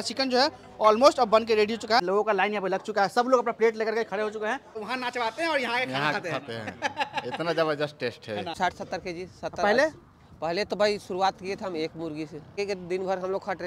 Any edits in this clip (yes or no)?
yes